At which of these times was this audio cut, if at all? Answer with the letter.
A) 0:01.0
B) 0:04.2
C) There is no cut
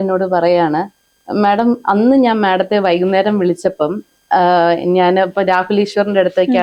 C